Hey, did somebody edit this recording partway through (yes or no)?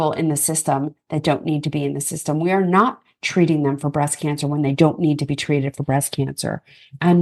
no